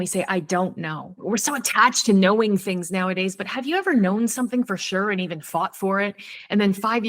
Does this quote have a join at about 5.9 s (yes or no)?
no